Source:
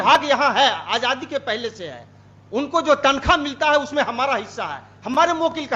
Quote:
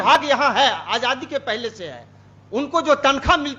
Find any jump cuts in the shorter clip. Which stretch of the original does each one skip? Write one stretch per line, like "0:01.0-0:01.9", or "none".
none